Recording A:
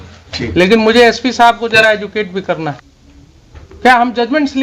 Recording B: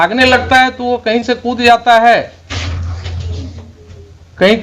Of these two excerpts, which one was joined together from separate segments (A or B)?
A